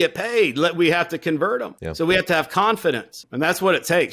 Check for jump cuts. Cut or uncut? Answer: cut